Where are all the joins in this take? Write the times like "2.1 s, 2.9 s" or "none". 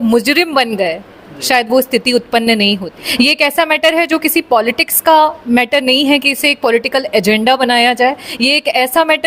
3.0 s